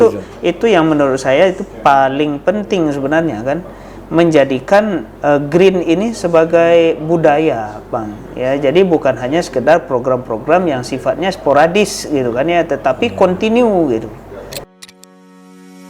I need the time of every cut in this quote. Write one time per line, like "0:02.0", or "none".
0:14.7